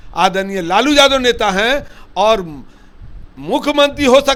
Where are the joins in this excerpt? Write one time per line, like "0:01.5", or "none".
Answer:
none